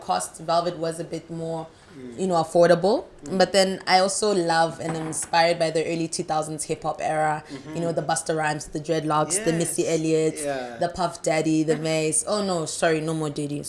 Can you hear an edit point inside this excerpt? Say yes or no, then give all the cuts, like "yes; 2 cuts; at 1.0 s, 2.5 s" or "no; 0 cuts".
no; 0 cuts